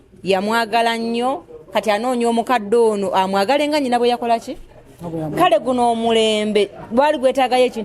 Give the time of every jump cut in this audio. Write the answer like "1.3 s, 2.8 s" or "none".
none